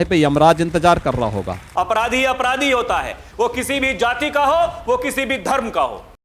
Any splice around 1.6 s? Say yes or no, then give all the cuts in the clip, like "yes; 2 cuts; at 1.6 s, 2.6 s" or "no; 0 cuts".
yes; 1 cut; at 1.6 s